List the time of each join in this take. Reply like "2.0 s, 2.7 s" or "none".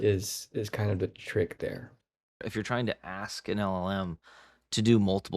2.4 s